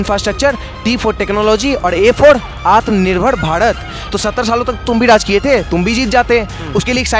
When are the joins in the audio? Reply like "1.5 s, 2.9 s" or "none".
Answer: 4.1 s